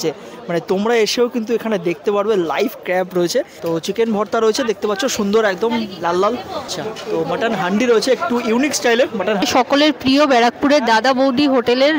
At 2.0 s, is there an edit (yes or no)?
no